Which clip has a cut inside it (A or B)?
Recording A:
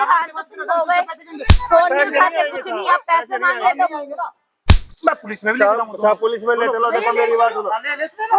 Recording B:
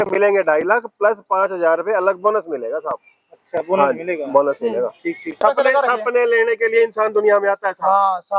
B